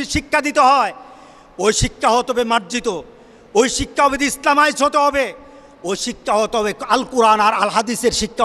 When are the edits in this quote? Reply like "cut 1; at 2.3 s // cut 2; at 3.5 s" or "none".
none